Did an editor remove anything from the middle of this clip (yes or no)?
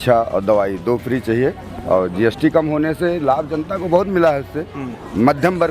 yes